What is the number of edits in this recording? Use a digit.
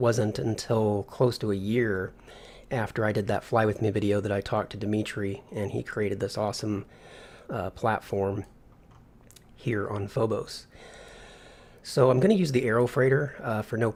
0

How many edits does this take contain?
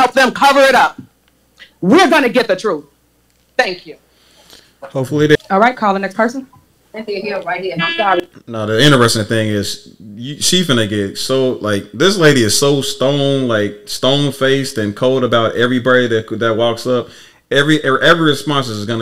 1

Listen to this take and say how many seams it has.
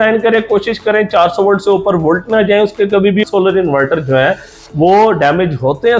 1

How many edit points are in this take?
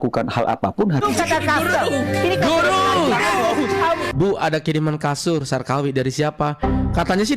2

